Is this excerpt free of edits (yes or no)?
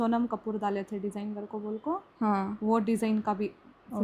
yes